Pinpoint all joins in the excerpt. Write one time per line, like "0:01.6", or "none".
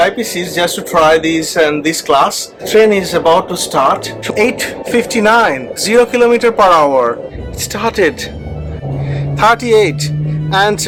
none